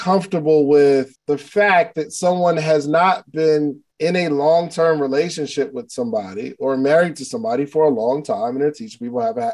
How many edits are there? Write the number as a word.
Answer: two